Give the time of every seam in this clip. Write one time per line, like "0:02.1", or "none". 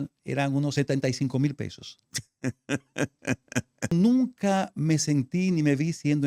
0:00.7
0:03.9